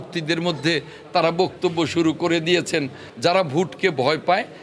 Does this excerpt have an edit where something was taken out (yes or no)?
yes